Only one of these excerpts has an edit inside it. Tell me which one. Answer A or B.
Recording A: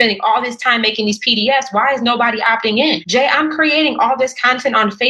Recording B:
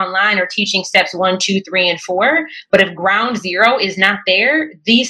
A